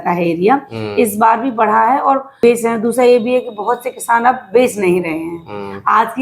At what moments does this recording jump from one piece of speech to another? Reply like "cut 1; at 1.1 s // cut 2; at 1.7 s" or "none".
cut 1; at 2.3 s

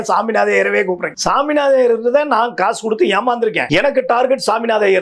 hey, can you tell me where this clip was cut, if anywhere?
cut 1; at 1.1 s // cut 2; at 3.6 s

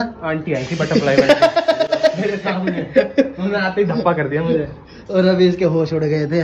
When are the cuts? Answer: none

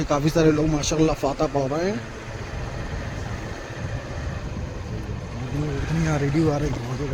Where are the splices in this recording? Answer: none

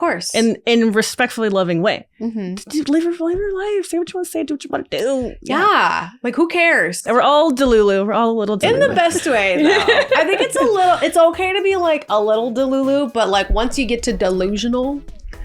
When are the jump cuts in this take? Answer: cut 1; at 7.1 s // cut 2; at 8.6 s

